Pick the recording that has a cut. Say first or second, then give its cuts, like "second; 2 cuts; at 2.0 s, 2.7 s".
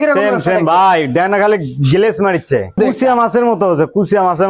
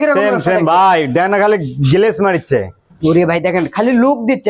first; 1 cut; at 2.8 s